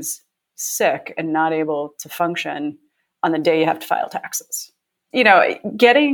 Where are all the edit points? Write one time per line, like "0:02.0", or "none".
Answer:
0:05.0